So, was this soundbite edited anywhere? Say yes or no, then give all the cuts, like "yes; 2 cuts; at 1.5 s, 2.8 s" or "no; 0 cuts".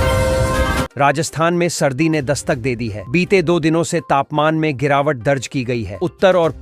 yes; 1 cut; at 0.9 s